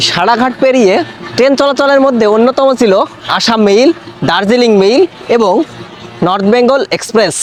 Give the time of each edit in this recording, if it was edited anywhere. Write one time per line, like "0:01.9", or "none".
none

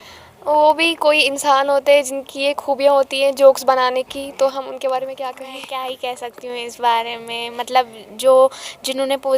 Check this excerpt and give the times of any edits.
0:05.5

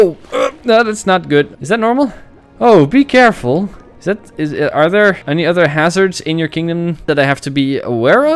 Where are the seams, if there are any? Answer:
0:01.6
0:07.0

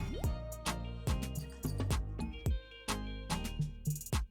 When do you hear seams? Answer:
none

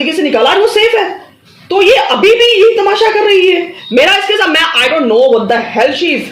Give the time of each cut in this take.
none

